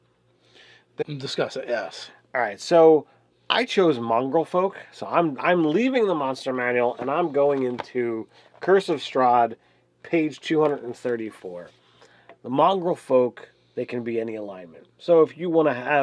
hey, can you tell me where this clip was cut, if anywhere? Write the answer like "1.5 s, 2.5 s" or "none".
none